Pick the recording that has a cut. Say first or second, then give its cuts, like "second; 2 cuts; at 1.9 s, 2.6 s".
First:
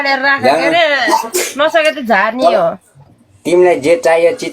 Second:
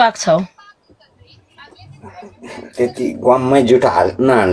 first; 1 cut; at 3.1 s